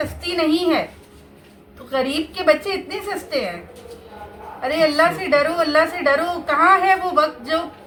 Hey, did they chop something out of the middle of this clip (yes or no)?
no